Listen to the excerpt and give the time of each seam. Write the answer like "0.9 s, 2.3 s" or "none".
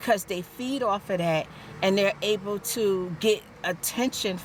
none